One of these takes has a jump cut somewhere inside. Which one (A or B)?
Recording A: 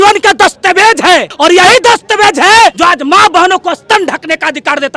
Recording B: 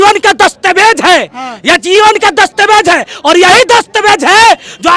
A